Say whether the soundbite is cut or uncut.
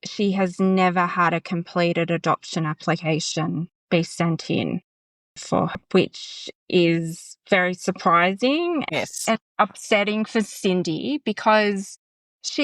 cut